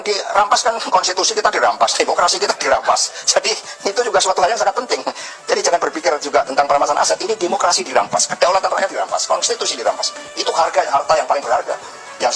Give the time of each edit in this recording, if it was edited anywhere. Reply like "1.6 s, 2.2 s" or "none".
none